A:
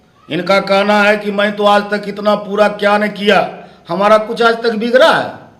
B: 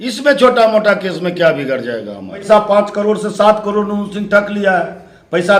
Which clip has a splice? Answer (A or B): B